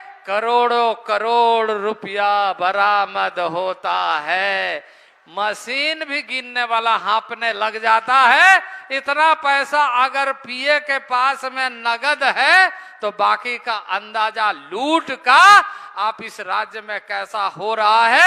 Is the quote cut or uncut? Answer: uncut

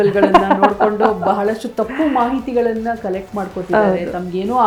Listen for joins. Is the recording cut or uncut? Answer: uncut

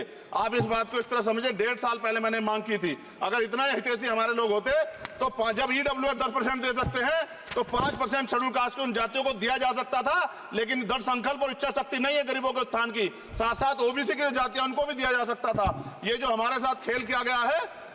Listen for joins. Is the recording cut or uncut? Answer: uncut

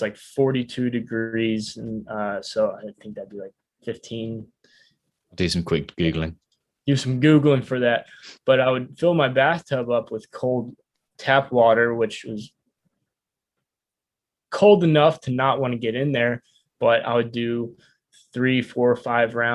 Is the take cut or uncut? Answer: uncut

